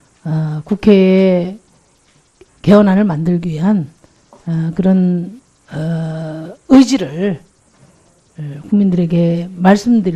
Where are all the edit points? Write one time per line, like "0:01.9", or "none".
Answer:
none